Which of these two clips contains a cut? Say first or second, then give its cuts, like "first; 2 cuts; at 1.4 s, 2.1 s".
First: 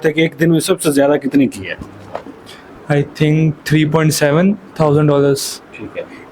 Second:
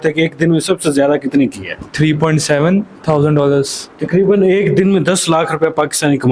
second; 2 cuts; at 1.9 s, 3.9 s